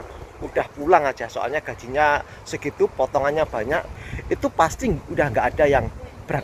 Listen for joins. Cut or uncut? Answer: cut